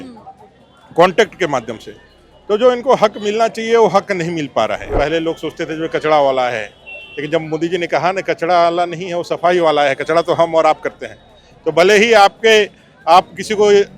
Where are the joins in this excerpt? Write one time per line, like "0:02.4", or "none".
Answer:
0:04.9